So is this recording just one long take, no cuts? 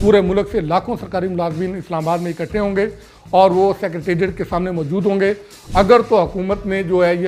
yes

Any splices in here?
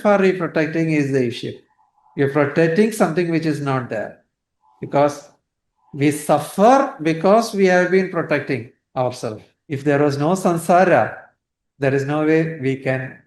yes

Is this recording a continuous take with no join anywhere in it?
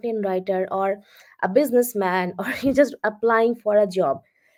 yes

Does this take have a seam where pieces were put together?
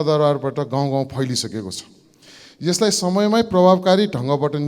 no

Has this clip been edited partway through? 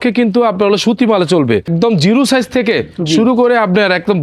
yes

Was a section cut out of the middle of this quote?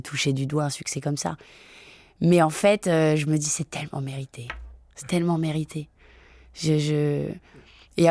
no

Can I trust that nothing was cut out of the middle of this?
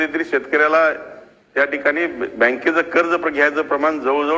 yes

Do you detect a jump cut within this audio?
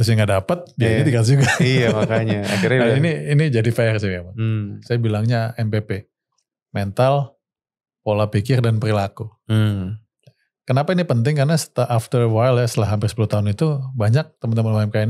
yes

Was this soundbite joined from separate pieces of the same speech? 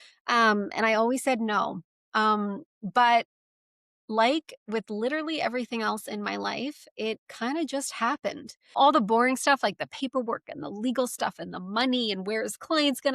yes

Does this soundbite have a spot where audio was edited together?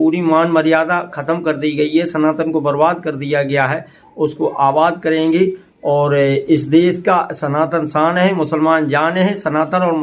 no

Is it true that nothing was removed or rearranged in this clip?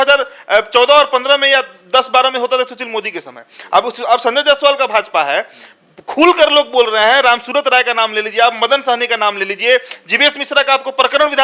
yes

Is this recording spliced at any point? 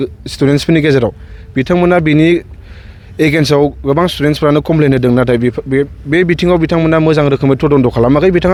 no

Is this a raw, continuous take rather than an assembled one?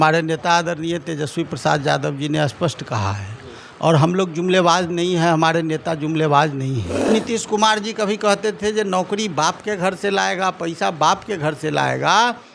no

